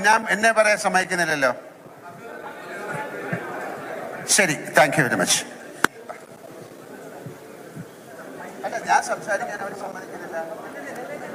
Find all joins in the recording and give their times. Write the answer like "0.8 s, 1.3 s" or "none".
none

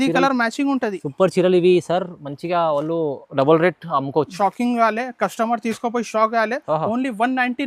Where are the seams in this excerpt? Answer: 4.4 s

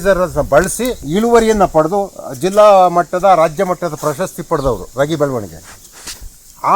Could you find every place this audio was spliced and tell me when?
1.0 s

